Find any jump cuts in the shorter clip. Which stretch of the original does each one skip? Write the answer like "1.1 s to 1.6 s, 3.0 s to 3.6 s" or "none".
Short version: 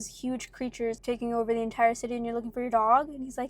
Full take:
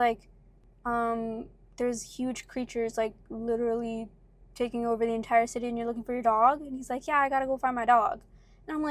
2.9 s to 4.5 s